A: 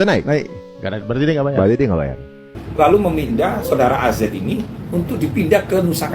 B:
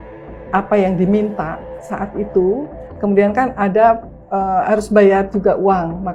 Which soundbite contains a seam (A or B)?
A